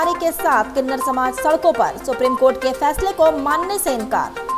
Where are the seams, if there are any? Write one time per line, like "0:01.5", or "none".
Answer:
none